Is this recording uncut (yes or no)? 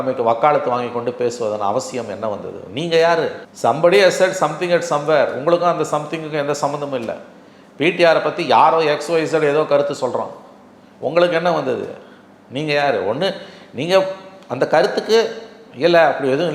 yes